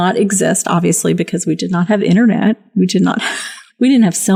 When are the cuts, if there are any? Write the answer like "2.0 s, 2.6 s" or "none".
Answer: none

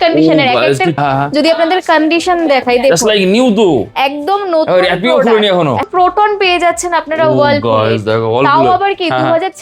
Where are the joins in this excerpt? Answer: 1.0 s, 5.9 s

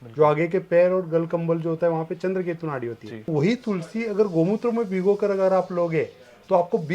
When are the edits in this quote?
3.3 s

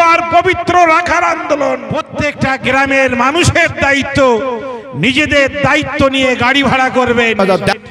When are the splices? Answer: 2.0 s

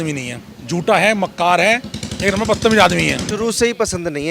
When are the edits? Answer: 3.2 s

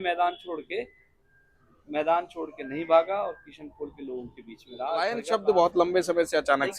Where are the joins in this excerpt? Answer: 5.2 s

